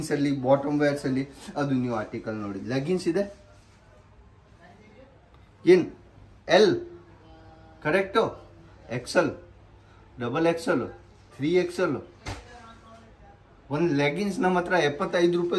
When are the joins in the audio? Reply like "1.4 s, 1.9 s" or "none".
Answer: none